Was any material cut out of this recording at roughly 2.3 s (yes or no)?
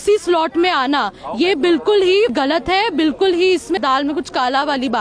yes